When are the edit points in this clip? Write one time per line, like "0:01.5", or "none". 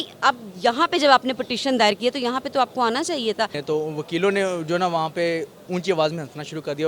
0:03.6